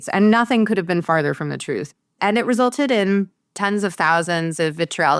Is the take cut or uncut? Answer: cut